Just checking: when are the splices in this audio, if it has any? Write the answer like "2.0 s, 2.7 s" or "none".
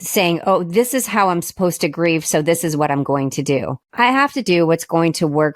3.8 s